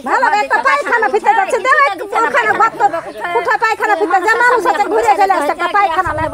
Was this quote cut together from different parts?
no; 0 cuts

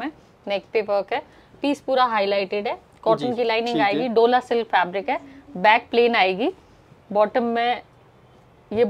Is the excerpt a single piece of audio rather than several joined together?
yes; 0 cuts

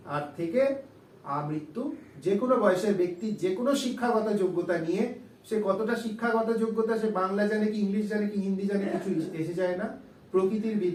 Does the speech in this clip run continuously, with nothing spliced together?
yes; 0 cuts

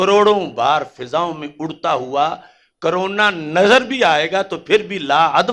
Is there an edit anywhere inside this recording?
no; 0 cuts

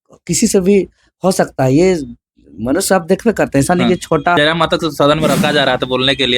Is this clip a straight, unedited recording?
no; 1 cut; at 4.4 s

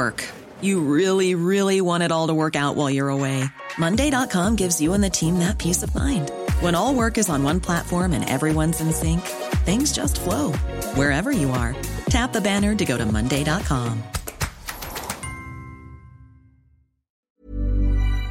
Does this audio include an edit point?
yes; 1 cut; at 17.3 s

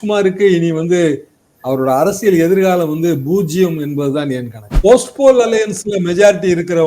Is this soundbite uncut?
no; 1 cut; at 4.6 s

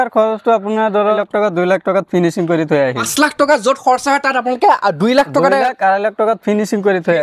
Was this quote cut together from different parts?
yes; 2 cuts; at 1.2 s, 3.1 s

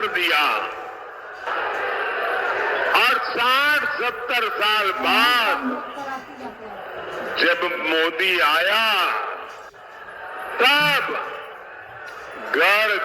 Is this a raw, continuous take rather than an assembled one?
no; 1 cut; at 1.5 s

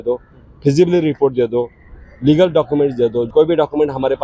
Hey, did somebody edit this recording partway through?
yes; 1 cut; at 3.3 s

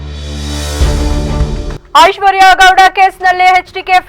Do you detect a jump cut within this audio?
yes; 1 cut; at 1.8 s

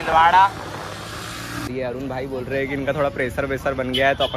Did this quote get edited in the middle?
yes; 1 cut; at 1.7 s

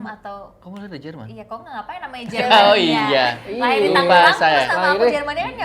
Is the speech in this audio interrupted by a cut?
no; 0 cuts

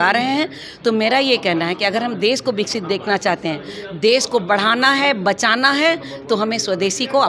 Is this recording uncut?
yes; 0 cuts

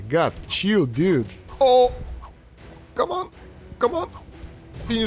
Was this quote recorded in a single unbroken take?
yes; 0 cuts

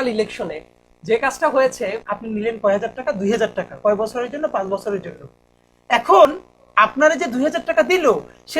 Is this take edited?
yes; 1 cut; at 2.0 s

